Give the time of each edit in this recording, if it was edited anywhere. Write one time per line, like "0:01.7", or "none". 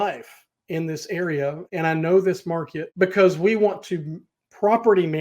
0:01.6
0:02.8